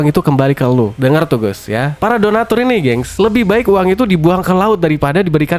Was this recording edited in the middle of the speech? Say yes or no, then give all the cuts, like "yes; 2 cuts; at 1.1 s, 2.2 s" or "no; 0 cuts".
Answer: no; 0 cuts